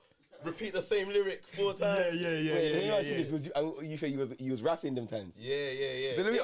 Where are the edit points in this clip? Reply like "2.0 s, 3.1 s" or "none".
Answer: none